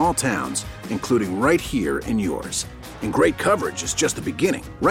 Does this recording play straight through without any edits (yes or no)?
yes